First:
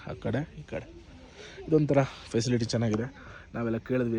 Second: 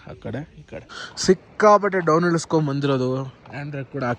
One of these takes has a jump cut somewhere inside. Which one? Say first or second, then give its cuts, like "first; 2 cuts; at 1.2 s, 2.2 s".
second; 1 cut; at 1.0 s